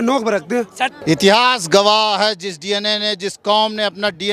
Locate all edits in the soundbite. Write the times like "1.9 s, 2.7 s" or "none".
1.0 s